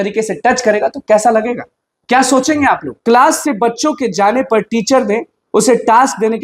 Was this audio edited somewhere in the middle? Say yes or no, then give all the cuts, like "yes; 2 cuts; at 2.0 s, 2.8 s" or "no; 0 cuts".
yes; 1 cut; at 2.9 s